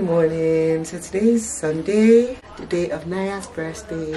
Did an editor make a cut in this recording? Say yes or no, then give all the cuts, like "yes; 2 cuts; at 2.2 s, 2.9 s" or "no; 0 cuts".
yes; 1 cut; at 2.5 s